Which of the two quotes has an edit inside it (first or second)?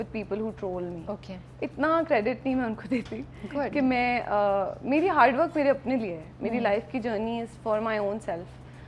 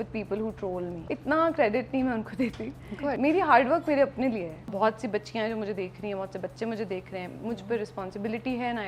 second